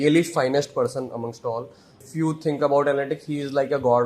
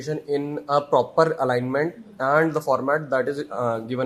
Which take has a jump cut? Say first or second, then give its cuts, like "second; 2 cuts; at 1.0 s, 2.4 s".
first; 1 cut; at 2.0 s